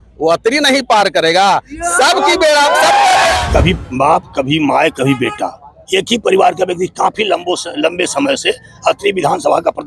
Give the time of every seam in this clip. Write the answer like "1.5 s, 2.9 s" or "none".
3.4 s